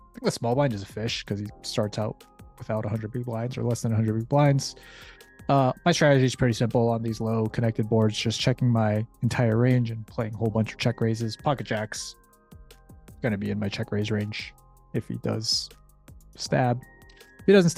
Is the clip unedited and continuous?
yes; 0 cuts

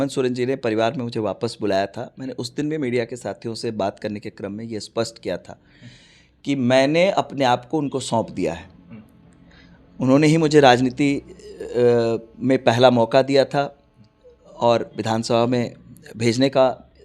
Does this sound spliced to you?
no; 0 cuts

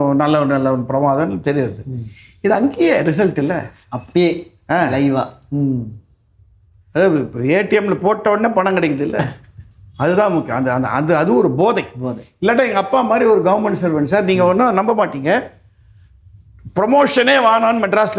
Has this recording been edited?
no; 0 cuts

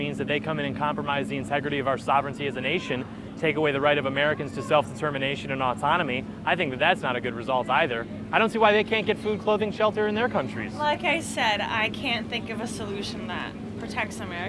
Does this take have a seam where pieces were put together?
no; 0 cuts

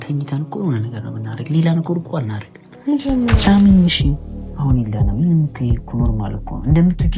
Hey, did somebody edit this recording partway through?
yes; 1 cut; at 3.4 s

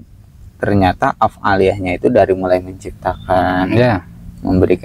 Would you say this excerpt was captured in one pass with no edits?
yes; 0 cuts

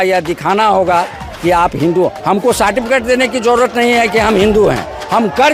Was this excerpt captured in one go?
yes; 0 cuts

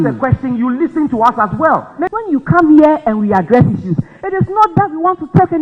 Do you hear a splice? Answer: yes; 1 cut; at 2.1 s

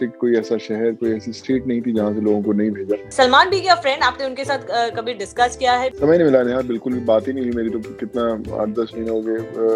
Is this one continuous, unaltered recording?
no; 2 cuts; at 3.1 s, 5.9 s

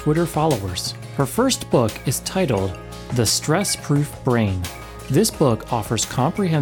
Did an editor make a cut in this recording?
no; 0 cuts

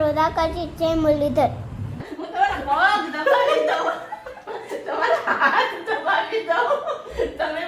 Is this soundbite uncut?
no; 1 cut; at 2.0 s

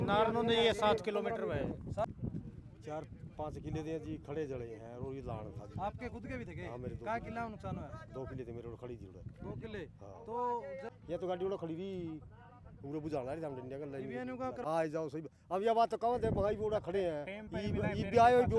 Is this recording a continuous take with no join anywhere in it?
no; 3 cuts; at 2.0 s, 10.9 s, 14.6 s

